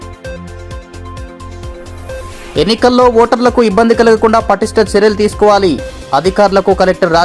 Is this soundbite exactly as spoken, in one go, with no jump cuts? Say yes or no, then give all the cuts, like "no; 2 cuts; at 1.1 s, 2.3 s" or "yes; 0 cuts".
yes; 0 cuts